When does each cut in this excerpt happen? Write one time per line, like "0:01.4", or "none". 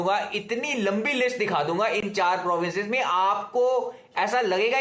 none